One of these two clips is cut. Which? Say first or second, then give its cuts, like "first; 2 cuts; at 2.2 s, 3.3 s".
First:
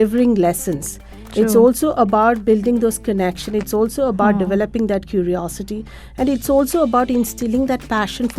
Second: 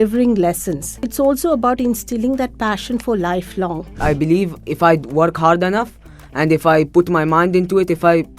second; 2 cuts; at 1.1 s, 3.9 s